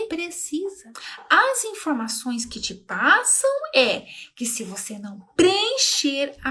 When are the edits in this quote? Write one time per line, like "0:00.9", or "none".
0:01.0